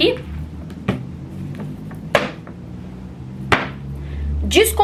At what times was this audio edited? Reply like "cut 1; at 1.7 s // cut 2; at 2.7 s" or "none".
none